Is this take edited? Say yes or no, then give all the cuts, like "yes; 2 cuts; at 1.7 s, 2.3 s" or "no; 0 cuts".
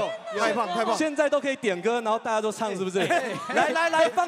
no; 0 cuts